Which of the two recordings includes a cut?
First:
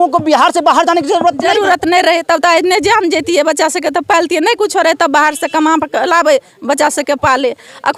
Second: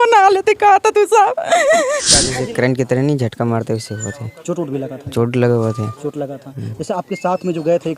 second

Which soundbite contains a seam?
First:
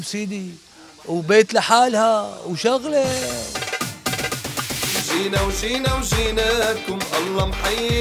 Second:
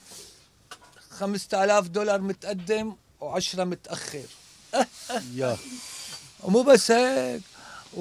first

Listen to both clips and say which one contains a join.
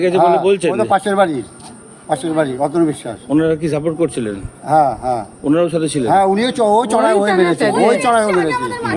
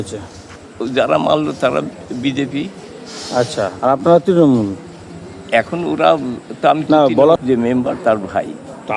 second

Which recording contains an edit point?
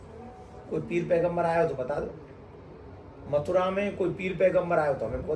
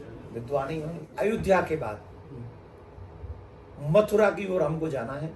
second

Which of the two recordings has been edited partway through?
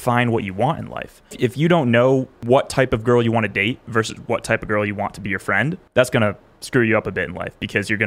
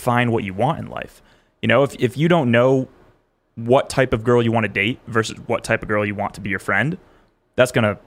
first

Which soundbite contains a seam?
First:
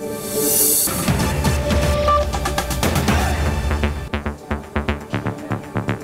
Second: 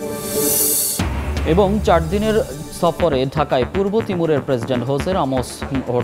first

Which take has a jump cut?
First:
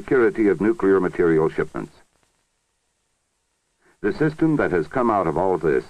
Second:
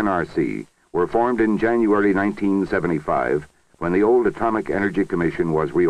second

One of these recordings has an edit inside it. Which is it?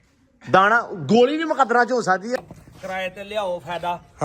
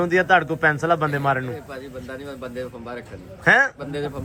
first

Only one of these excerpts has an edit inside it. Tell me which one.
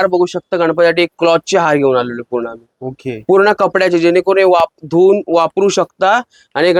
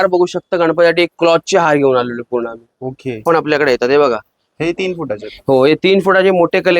second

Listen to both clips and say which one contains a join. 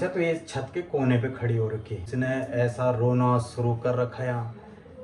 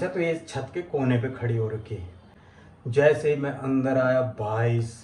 first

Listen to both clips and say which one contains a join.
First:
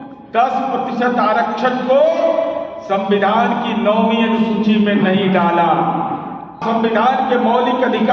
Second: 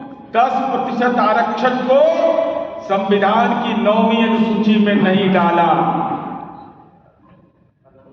first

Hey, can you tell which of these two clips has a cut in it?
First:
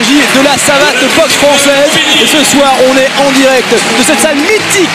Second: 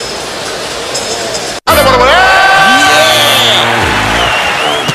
first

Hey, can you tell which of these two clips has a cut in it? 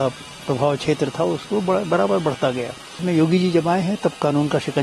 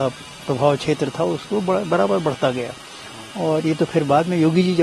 first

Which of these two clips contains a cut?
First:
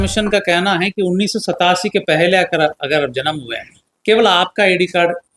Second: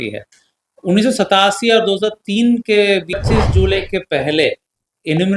second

